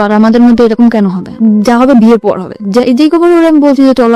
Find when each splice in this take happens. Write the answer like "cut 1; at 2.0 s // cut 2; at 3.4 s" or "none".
none

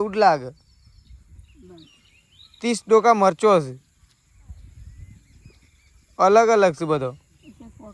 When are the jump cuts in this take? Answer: none

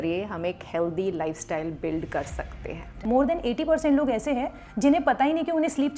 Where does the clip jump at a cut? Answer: cut 1; at 2.9 s

